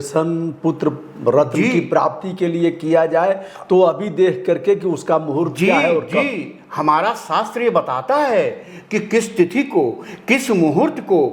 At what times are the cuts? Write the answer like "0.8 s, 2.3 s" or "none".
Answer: none